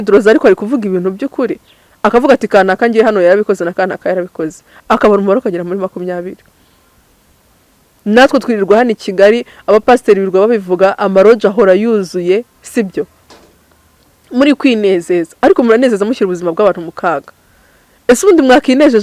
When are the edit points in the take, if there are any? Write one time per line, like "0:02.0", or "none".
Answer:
none